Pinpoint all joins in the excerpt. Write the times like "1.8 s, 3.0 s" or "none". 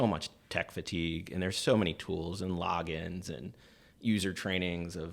none